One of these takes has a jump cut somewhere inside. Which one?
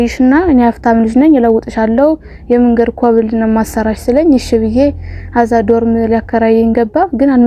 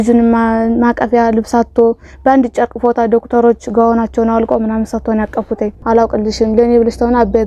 second; 1 cut; at 5.8 s

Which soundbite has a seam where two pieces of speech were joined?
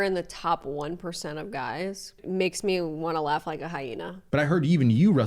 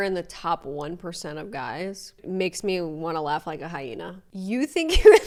first; 1 cut; at 4.2 s

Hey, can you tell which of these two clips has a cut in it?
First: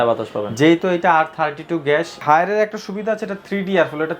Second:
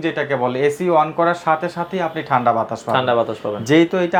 first; 1 cut; at 2.2 s

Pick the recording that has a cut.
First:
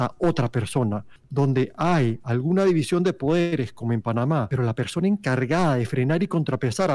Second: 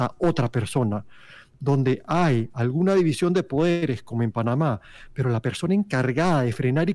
first; 2 cuts; at 1.1 s, 4.5 s

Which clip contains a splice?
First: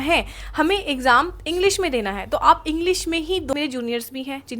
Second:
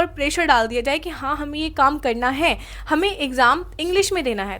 first; 1 cut; at 3.5 s

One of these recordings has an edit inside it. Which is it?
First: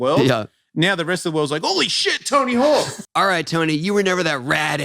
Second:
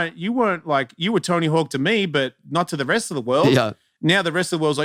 first; 1 cut; at 3.0 s

